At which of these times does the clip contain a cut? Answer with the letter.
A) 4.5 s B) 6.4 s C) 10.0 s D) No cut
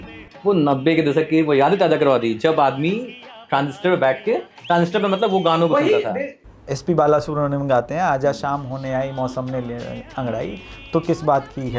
B